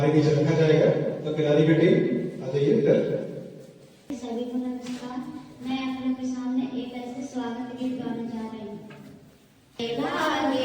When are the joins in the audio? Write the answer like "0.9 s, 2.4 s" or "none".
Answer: 4.1 s